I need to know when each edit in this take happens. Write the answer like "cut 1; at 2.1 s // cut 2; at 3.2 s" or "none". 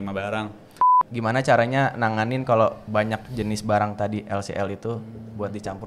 cut 1; at 0.9 s